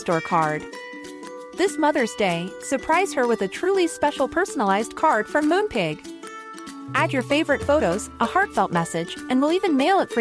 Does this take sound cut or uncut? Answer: uncut